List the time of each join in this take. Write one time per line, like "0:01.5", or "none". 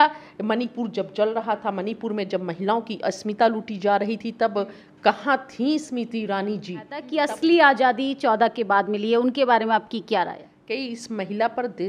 0:07.0
0:10.5